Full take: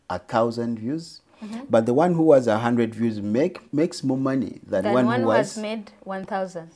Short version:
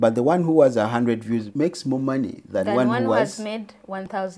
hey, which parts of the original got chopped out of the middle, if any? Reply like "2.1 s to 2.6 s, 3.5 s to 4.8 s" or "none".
3.2 s to 3.7 s